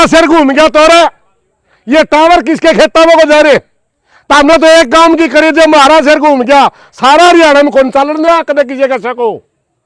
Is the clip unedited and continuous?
yes; 0 cuts

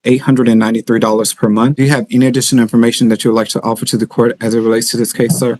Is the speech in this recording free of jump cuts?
no; 1 cut; at 1.8 s

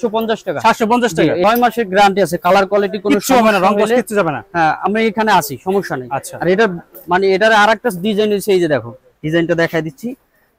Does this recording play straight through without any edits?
no; 1 cut; at 1.4 s

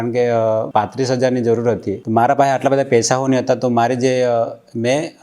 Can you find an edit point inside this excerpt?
yes; 1 cut; at 1.9 s

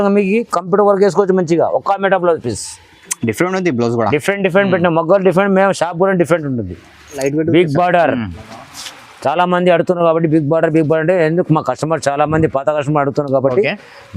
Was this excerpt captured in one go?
no; 1 cut; at 7.2 s

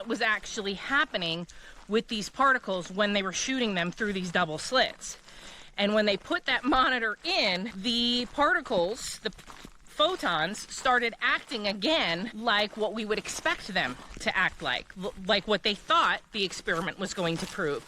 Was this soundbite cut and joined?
yes; 2 cuts; at 7.7 s, 12.3 s

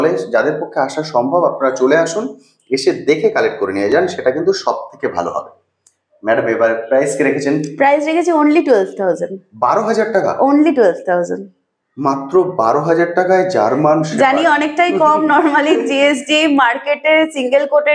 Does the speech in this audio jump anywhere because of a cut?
no; 0 cuts

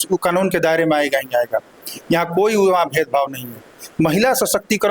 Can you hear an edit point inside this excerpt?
no; 0 cuts

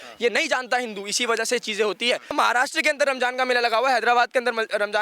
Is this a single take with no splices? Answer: no; 1 cut; at 2.3 s

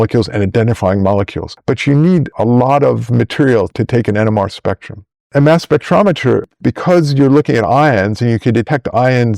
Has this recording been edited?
yes; 2 cuts; at 5.3 s, 6.5 s

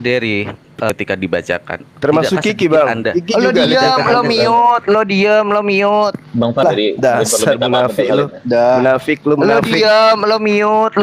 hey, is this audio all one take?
no; 2 cuts; at 0.9 s, 6.6 s

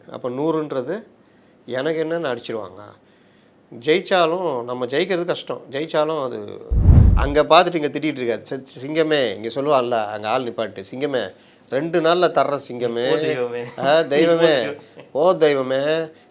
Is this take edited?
yes; 1 cut; at 7.0 s

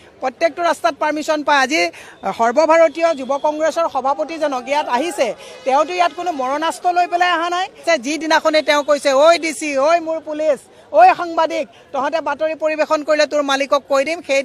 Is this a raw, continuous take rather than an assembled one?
no; 1 cut; at 7.8 s

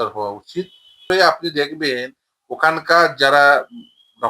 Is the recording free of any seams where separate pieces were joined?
no; 1 cut; at 1.0 s

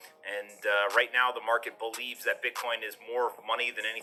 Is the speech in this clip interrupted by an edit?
no; 0 cuts

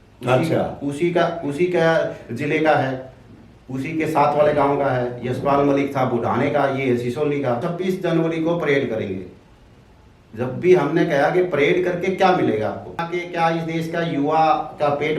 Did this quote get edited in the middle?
yes; 2 cuts; at 7.7 s, 13.0 s

